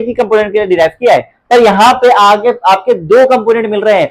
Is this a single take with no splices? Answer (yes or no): yes